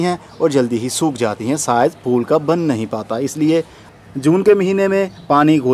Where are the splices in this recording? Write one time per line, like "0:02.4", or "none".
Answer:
0:03.8